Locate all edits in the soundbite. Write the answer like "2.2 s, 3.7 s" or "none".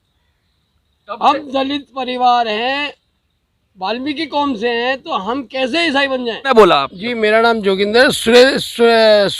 6.5 s